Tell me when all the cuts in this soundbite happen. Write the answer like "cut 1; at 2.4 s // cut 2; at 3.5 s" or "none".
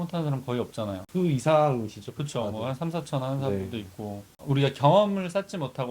cut 1; at 1.0 s // cut 2; at 4.3 s